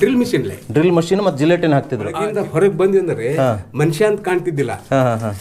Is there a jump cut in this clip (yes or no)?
yes